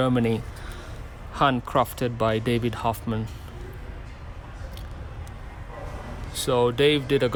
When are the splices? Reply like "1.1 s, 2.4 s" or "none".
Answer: none